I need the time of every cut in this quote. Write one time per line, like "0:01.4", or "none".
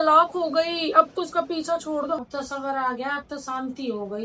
0:02.3